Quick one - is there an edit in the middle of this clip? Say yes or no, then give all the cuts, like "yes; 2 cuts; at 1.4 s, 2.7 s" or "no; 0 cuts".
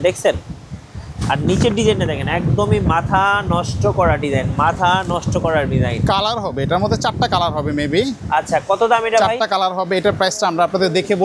no; 0 cuts